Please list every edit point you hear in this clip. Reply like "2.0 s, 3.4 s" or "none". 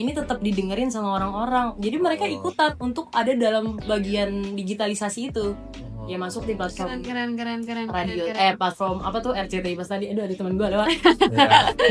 none